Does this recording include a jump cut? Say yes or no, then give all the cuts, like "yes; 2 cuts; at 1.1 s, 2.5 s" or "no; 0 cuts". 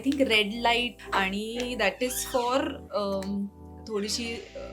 yes; 1 cut; at 1.0 s